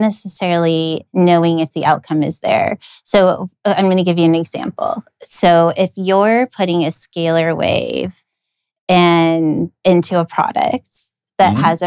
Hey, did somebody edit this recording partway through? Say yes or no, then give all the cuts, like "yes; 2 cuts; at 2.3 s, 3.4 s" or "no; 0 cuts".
no; 0 cuts